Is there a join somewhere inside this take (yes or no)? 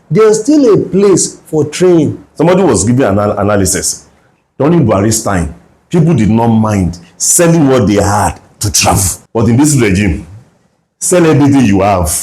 yes